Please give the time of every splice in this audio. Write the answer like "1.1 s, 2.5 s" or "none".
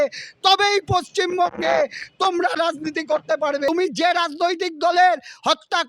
3.7 s